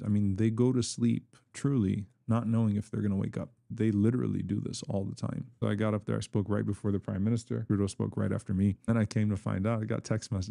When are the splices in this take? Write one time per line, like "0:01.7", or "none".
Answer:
0:03.7
0:05.5
0:07.6
0:08.9